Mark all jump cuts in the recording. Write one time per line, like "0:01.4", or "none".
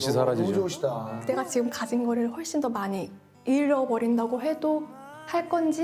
0:01.1